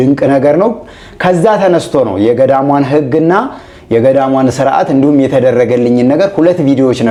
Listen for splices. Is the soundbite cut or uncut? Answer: uncut